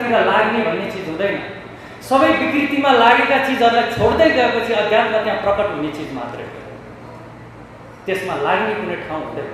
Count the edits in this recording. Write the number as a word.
zero